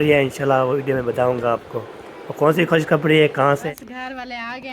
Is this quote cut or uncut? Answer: cut